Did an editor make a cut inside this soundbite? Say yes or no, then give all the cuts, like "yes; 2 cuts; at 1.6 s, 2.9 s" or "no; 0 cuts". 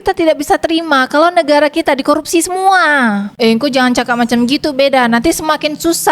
yes; 1 cut; at 3.3 s